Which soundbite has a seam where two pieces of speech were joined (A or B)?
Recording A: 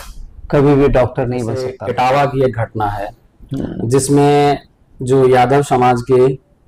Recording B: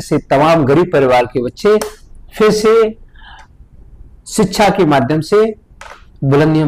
A